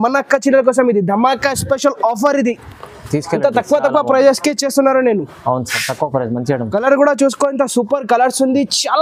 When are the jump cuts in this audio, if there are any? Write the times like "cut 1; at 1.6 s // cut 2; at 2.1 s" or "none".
none